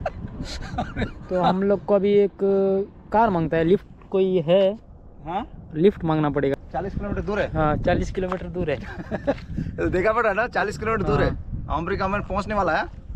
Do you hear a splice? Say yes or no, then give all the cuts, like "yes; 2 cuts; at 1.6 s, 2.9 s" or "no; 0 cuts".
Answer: yes; 1 cut; at 6.5 s